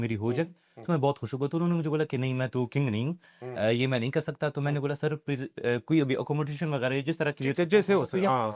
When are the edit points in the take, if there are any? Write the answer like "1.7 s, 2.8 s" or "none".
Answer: none